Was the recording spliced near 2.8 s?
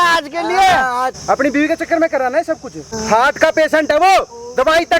yes; 2 cuts; at 1.1 s, 2.8 s

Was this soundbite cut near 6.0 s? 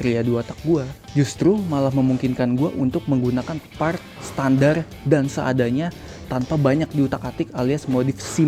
no; 0 cuts

